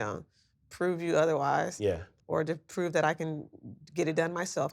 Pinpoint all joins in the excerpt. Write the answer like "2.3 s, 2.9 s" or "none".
2.1 s